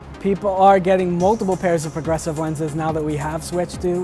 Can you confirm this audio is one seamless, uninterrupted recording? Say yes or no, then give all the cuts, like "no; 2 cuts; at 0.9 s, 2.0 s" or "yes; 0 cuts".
yes; 0 cuts